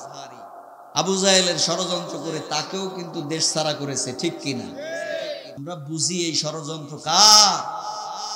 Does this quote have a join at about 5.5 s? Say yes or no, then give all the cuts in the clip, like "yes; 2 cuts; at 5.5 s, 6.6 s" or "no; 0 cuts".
yes; 1 cut; at 5.5 s